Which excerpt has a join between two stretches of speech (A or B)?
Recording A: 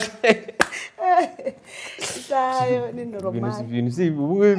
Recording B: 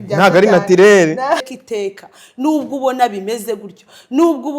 B